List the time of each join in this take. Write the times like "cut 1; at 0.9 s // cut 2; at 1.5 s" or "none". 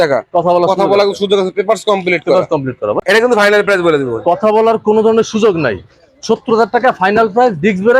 cut 1; at 3.0 s